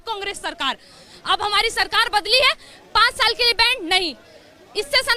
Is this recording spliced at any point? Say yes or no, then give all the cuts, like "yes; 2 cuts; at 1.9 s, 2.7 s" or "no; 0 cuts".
no; 0 cuts